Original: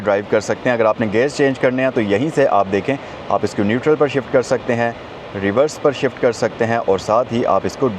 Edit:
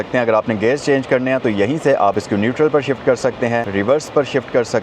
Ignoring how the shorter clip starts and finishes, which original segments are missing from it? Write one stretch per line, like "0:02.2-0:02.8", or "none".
0:02.7-0:03.4
0:04.9-0:05.4